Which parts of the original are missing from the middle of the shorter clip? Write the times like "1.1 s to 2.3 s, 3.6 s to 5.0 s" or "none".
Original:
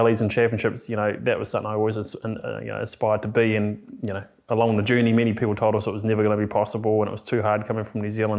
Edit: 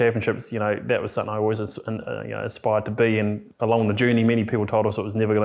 3.8 s to 4.3 s